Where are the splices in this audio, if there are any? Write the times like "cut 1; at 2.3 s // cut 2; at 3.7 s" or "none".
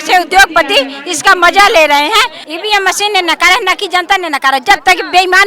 cut 1; at 2.4 s